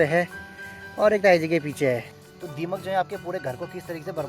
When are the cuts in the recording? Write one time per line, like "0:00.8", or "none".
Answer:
0:02.1